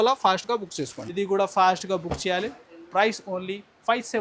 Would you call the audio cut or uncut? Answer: cut